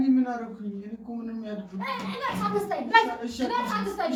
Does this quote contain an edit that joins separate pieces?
no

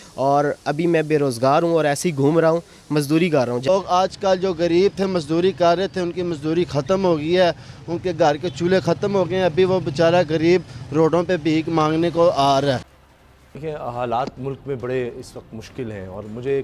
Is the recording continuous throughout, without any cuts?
no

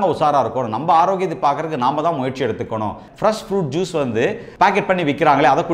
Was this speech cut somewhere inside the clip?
yes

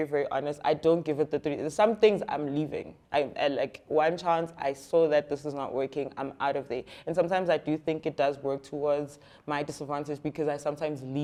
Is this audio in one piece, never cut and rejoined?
yes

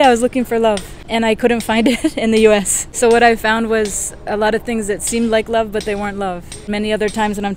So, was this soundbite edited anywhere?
yes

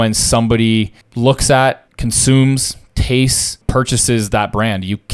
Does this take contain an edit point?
yes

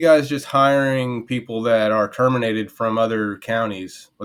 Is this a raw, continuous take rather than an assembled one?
yes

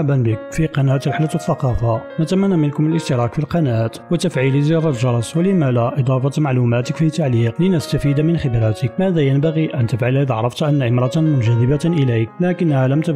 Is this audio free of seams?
no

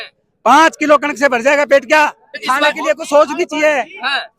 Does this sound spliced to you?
yes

